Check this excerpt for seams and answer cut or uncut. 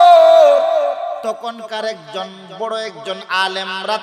cut